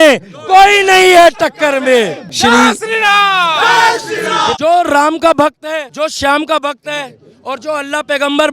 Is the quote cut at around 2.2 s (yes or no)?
yes